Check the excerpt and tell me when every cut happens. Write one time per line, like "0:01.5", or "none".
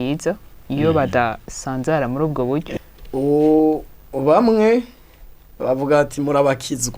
0:02.7